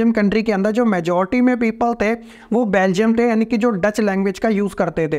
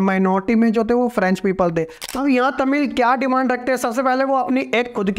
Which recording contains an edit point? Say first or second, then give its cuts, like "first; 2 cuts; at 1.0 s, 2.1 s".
second; 1 cut; at 2.0 s